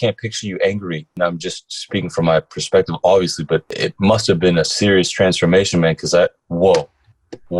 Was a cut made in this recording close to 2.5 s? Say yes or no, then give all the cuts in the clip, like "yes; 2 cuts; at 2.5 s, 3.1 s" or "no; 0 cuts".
no; 3 cuts; at 1.1 s, 3.7 s, 4.7 s